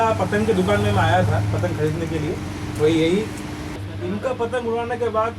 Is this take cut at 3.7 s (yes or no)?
yes